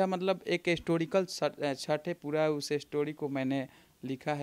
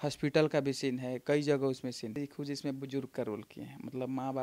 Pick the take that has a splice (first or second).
second